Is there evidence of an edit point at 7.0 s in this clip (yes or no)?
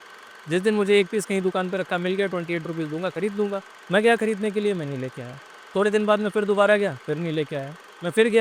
no